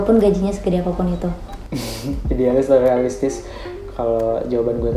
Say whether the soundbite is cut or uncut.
cut